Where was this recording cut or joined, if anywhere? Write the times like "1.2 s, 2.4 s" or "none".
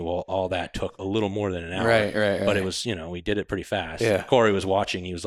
none